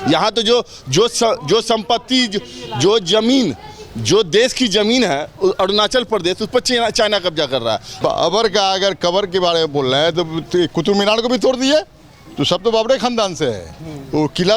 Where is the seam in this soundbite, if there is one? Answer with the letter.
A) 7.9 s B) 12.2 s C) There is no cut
A